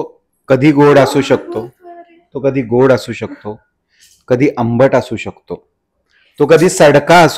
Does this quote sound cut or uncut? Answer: uncut